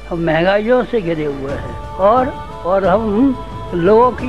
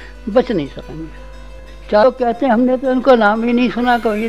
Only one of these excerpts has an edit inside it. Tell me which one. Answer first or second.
second